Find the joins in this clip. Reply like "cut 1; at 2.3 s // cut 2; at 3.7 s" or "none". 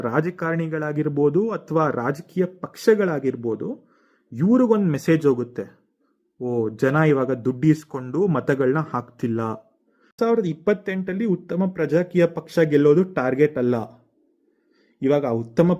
cut 1; at 10.1 s